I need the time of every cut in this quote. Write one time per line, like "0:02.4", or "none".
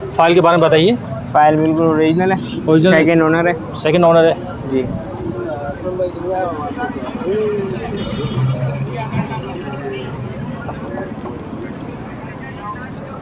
none